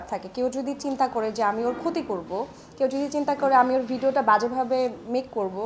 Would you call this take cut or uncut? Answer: uncut